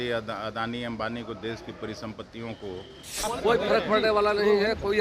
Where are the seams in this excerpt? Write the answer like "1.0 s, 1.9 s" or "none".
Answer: 3.2 s

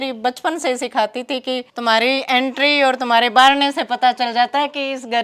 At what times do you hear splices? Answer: none

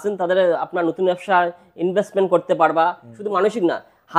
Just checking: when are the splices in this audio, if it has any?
3.2 s

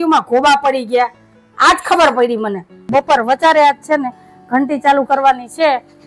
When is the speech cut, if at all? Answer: 2.8 s

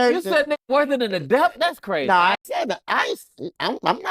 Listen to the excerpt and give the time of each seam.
2.4 s

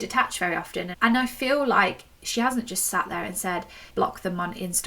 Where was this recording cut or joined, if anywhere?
0.9 s

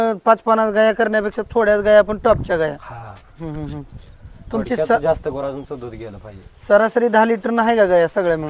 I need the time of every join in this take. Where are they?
none

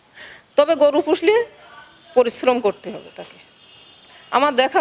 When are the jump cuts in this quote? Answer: none

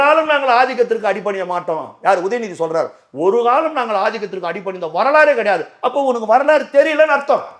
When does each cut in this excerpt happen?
none

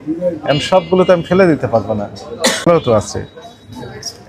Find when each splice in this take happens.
2.7 s

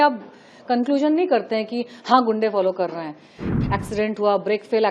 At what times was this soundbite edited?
3.4 s

